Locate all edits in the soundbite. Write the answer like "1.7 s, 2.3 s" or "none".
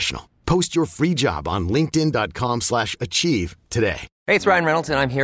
none